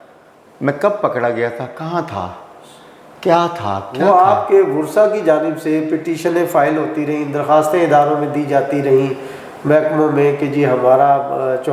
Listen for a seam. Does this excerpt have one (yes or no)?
no